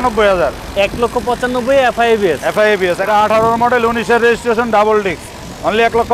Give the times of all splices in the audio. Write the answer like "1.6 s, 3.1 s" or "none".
3.0 s